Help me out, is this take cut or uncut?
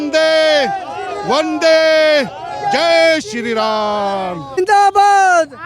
cut